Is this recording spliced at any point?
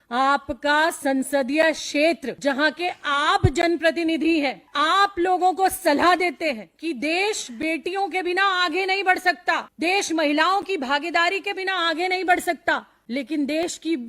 yes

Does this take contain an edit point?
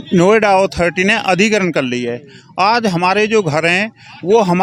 no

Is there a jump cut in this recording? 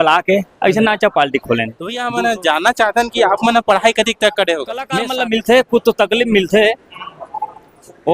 yes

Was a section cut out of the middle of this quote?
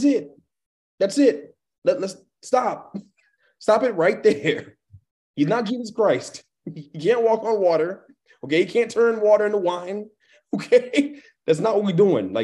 no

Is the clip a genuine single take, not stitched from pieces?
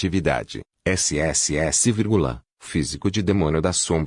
yes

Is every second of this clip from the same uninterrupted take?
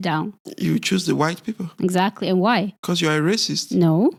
yes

